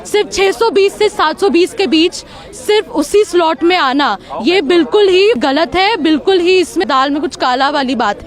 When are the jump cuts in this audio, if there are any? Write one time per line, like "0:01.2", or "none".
0:05.4
0:06.8